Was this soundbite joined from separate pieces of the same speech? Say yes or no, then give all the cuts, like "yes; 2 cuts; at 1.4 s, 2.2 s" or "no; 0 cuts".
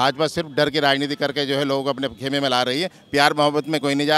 no; 0 cuts